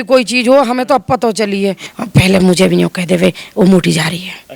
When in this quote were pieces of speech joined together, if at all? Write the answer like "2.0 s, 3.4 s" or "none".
1.9 s